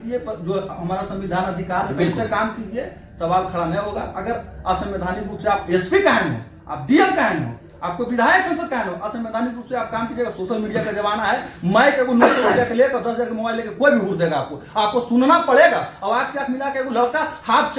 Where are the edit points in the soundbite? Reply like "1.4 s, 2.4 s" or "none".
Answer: none